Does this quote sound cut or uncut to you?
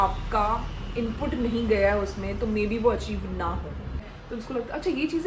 cut